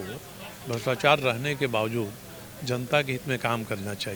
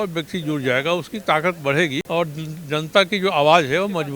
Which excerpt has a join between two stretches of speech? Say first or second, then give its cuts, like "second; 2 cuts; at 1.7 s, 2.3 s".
second; 1 cut; at 2.0 s